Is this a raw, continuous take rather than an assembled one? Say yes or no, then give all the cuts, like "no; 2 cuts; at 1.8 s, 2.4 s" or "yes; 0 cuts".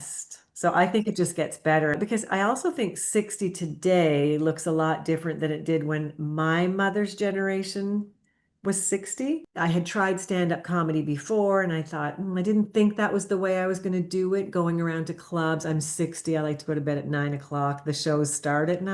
no; 2 cuts; at 2.0 s, 9.5 s